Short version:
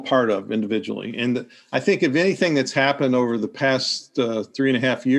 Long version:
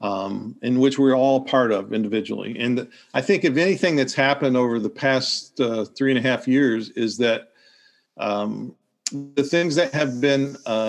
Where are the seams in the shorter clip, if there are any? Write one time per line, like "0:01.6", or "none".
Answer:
none